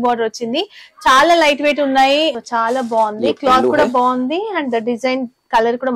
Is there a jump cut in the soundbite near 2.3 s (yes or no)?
yes